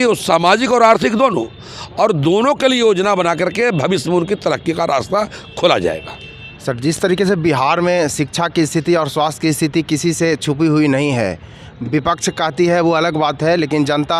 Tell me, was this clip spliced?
no; 0 cuts

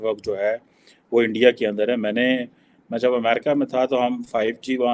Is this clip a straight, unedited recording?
yes; 0 cuts

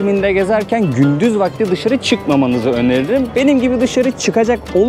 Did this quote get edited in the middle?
no; 0 cuts

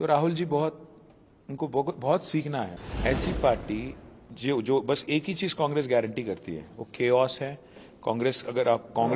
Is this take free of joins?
no; 1 cut; at 2.8 s

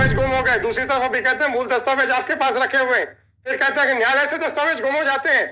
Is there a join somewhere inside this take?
no; 0 cuts

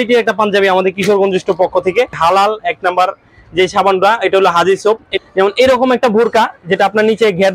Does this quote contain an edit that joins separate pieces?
yes; 2 cuts; at 2.2 s, 5.1 s

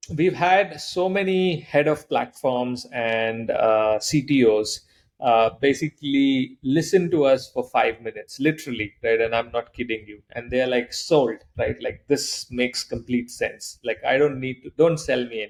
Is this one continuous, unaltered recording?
yes; 0 cuts

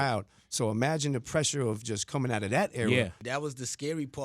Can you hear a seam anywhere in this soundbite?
yes; 1 cut; at 3.2 s

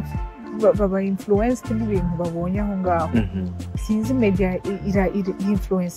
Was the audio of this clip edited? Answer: no; 0 cuts

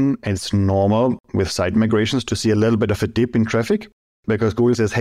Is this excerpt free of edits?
no; 1 cut; at 1.2 s

